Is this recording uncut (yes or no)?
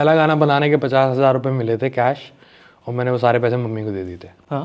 yes